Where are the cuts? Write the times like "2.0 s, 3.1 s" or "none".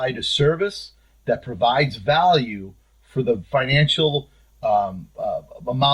none